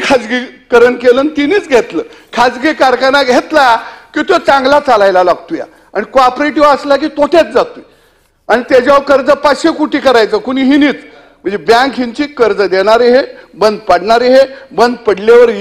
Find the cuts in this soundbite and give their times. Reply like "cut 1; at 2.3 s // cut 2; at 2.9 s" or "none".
none